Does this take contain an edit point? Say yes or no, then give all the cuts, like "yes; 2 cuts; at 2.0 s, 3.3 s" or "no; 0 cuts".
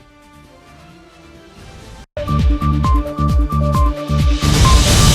yes; 1 cut; at 2.1 s